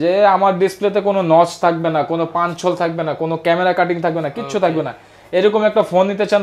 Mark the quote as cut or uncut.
uncut